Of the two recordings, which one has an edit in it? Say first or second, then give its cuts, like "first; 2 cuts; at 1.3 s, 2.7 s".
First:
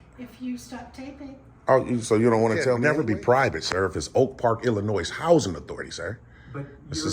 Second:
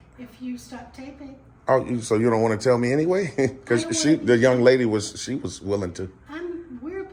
first; 1 cut; at 2.8 s